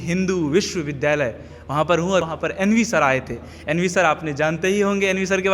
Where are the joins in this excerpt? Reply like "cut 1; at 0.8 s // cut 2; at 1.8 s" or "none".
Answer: cut 1; at 2.2 s